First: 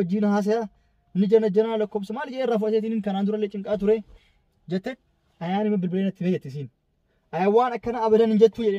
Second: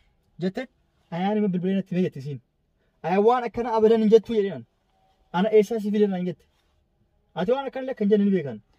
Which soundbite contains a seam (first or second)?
second